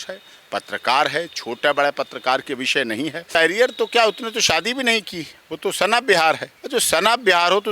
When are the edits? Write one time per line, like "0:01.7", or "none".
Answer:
0:03.4
0:06.5